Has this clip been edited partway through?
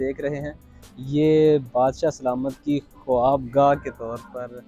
no; 0 cuts

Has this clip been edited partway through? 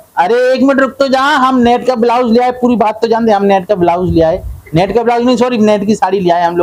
no; 0 cuts

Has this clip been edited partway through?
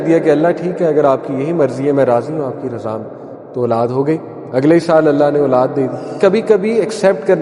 yes; 1 cut; at 6.2 s

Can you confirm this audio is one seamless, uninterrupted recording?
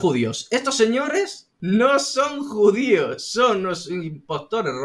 no; 1 cut; at 1.5 s

